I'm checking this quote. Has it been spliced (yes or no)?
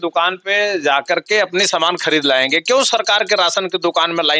no